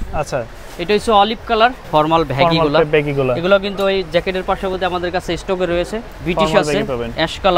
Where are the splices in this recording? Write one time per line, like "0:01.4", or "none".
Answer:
0:01.8
0:06.0